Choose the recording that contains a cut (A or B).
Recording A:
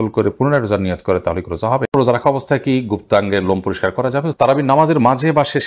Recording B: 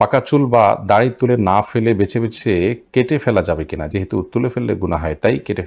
A